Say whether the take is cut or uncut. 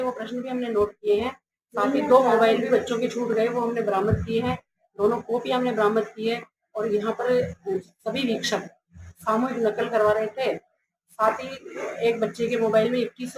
uncut